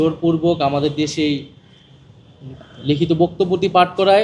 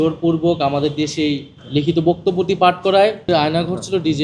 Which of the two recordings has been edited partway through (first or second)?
second